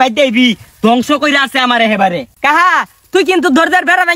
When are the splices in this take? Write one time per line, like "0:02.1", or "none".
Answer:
0:02.3